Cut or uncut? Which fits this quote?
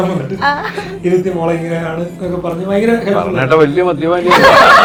uncut